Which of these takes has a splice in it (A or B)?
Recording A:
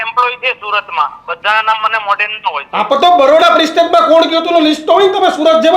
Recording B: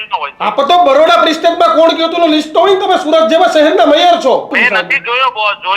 B